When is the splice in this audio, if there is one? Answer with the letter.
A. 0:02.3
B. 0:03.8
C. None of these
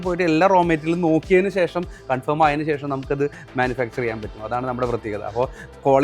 C